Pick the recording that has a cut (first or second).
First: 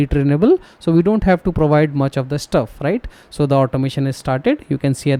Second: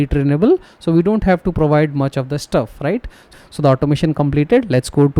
second